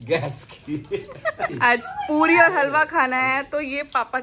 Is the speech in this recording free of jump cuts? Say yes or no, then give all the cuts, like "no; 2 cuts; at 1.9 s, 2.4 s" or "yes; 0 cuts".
no; 1 cut; at 1.5 s